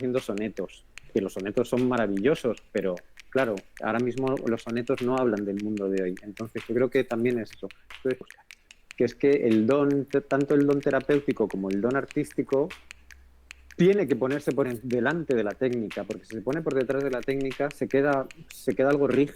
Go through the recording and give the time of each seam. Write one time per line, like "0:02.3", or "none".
0:08.3